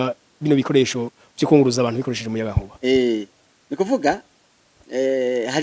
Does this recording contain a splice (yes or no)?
no